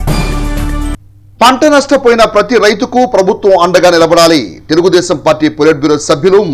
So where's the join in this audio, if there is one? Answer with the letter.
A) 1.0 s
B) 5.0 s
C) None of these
A